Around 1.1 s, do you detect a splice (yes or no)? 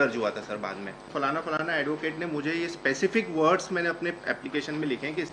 yes